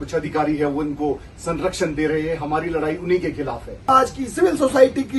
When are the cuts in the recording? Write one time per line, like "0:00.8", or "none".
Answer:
0:03.9